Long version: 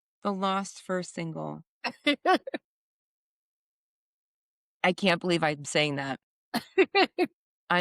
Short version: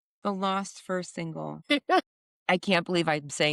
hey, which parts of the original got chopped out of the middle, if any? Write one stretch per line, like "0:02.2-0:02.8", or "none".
0:01.6-0:02.0
0:02.6-0:04.6